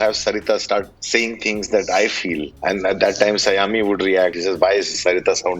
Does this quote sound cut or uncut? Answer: cut